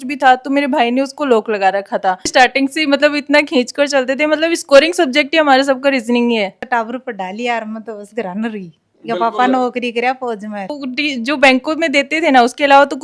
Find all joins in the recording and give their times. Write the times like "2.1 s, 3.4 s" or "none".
2.3 s, 6.6 s, 10.8 s